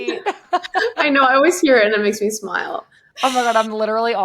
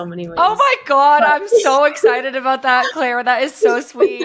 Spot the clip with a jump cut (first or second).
first